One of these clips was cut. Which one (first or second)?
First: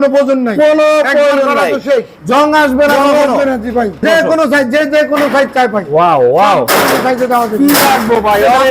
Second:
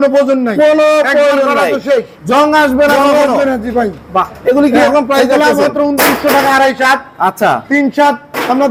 first